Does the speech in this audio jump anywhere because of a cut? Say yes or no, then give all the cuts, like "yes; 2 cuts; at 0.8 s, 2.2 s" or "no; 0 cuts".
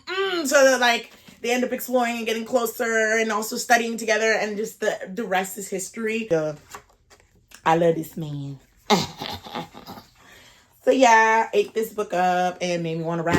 yes; 1 cut; at 6.3 s